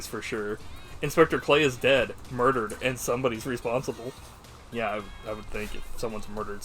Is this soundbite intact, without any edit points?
no; 1 cut; at 4.6 s

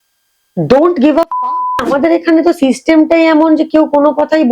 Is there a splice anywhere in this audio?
yes; 1 cut; at 1.8 s

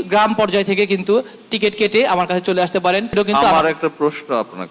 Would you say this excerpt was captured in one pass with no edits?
no; 1 cut; at 3.1 s

